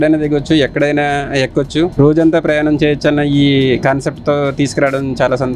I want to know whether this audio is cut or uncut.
uncut